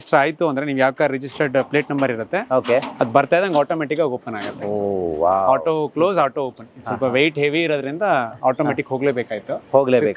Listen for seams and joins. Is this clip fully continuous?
yes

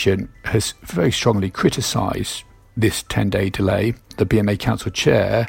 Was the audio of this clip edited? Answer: yes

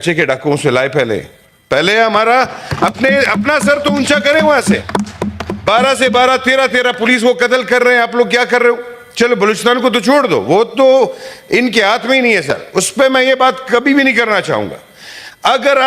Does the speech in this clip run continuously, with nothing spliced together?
yes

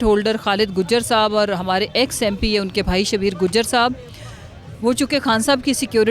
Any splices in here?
no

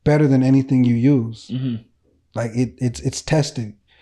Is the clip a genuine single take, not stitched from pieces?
yes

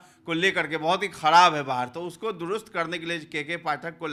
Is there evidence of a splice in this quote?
no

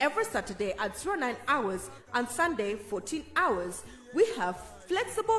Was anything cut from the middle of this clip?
no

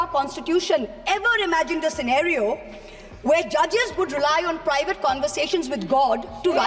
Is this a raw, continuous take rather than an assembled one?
yes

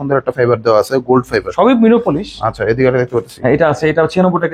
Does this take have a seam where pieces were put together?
no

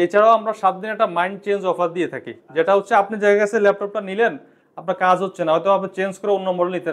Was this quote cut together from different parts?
no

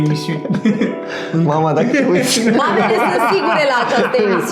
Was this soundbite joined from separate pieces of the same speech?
no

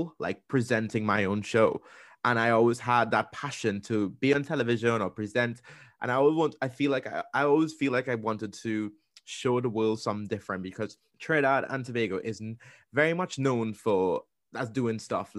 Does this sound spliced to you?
yes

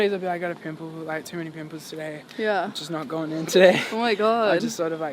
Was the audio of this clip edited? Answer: no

